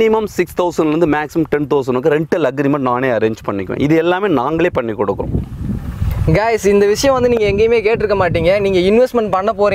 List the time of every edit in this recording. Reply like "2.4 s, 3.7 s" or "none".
none